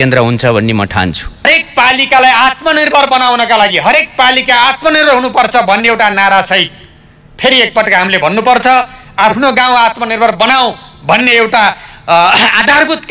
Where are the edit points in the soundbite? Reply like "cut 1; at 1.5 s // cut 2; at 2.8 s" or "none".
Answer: cut 1; at 1.5 s